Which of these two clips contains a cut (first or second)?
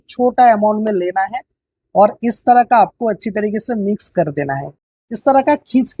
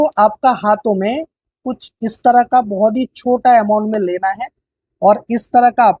first